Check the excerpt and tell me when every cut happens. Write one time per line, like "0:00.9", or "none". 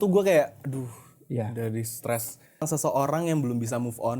0:02.7

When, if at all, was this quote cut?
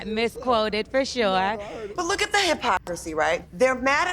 0:01.9

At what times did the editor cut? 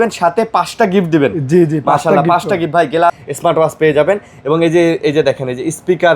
0:03.2

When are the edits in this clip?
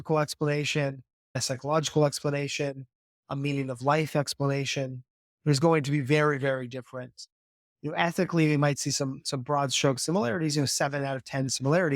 0:01.4

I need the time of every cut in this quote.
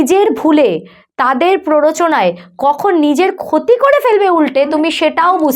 none

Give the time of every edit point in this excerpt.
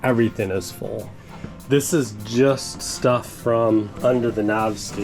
0:01.2

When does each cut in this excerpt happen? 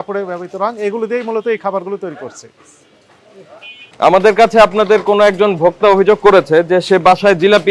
0:03.9

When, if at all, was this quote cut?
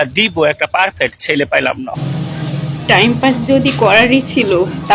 0:02.0

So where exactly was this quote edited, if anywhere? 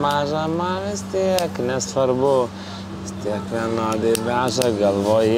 none

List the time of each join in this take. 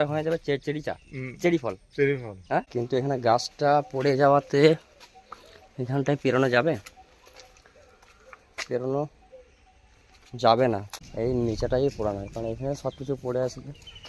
0:02.7
0:10.9

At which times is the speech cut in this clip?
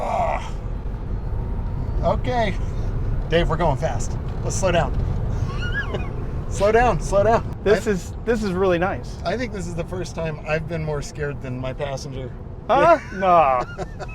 0:07.5

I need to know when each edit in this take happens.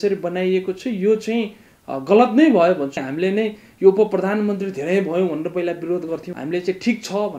0:03.0
0:06.3

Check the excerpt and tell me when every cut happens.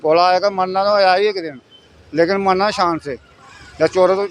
none

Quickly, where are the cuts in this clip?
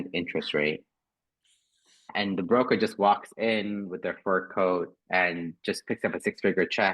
0:02.0

